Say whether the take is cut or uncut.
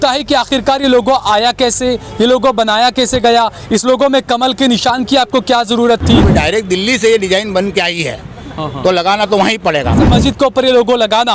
cut